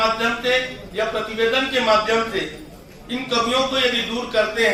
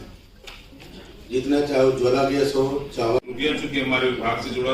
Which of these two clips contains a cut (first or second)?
second